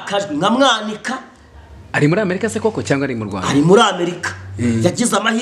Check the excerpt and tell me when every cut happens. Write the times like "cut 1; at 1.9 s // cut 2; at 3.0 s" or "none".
none